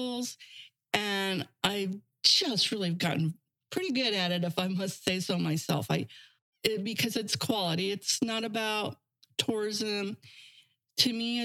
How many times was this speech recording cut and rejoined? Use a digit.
1